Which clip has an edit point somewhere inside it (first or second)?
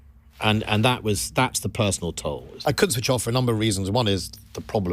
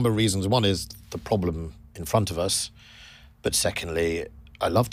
first